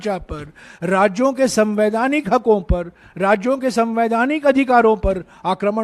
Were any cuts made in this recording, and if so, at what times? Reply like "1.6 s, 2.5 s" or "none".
none